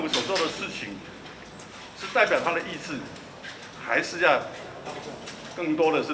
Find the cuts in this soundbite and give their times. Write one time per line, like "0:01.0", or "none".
none